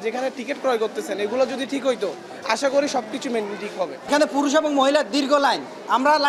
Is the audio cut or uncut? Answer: uncut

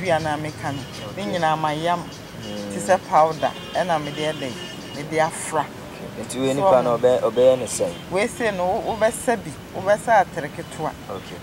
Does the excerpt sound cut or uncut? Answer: uncut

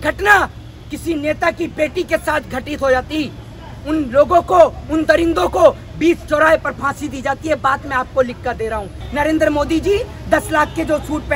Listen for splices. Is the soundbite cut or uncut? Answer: cut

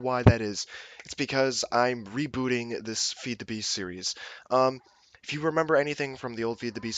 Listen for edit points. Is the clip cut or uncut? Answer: uncut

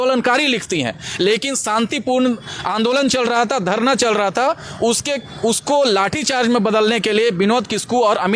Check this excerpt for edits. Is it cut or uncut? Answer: uncut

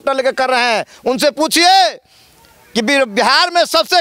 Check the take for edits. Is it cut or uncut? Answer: uncut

